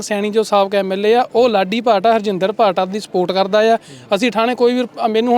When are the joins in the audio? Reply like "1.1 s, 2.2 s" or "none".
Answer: none